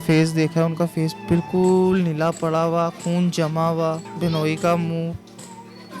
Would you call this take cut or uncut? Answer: cut